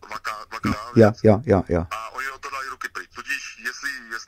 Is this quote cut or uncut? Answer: uncut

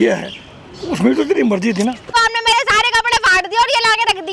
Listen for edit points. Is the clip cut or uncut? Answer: cut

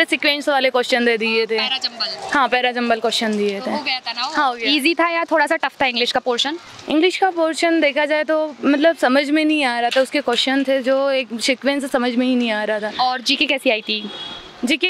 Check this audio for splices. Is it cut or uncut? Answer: uncut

